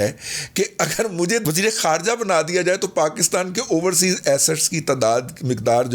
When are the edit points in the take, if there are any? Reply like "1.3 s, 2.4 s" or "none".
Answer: 1.4 s